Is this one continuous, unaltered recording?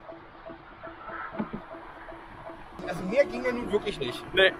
yes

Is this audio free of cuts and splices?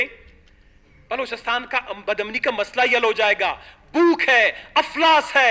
yes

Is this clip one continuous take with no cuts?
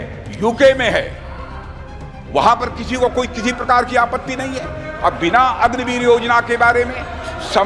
yes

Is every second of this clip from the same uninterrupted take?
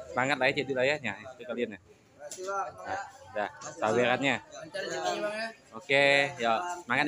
yes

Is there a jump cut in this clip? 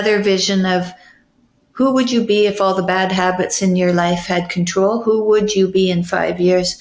no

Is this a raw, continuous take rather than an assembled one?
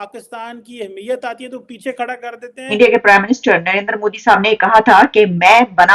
no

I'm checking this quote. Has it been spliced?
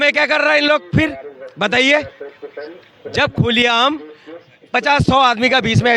no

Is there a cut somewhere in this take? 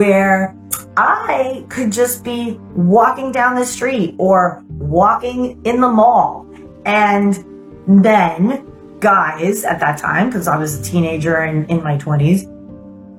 no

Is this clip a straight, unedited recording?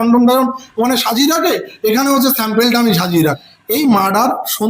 no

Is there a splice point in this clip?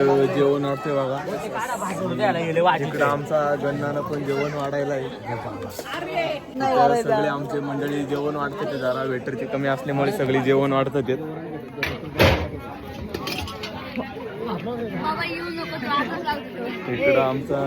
yes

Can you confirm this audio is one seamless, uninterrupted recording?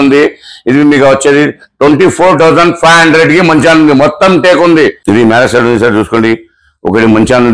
no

